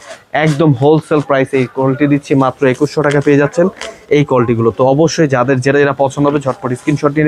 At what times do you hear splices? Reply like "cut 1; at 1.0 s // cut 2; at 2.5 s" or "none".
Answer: none